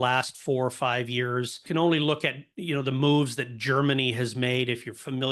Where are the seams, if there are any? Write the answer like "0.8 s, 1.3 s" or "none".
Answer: none